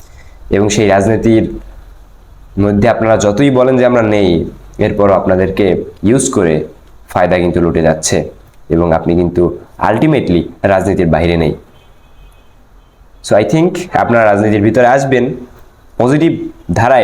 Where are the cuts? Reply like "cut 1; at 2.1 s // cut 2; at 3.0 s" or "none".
none